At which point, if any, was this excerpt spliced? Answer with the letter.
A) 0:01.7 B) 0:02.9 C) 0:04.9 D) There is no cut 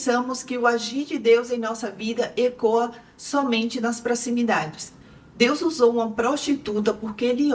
C